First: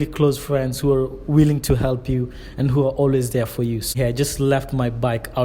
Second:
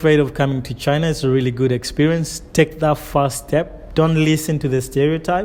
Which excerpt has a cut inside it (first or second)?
first